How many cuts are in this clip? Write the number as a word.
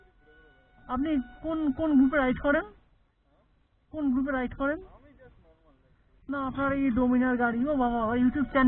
zero